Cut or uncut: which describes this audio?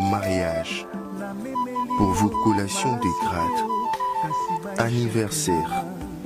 uncut